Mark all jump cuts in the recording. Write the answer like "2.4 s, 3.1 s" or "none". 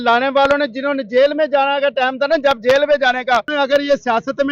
3.5 s